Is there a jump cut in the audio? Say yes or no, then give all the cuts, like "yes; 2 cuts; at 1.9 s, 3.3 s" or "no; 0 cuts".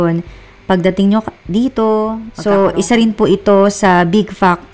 yes; 1 cut; at 2.3 s